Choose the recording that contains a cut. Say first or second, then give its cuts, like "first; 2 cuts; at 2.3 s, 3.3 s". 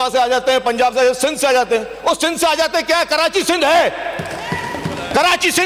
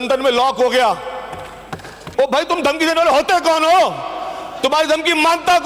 second; 1 cut; at 2.0 s